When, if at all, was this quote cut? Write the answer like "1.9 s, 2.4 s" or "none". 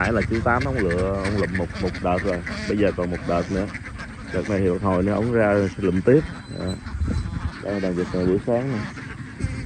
none